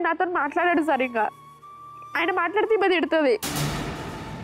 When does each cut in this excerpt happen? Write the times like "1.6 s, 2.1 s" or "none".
1.4 s, 3.4 s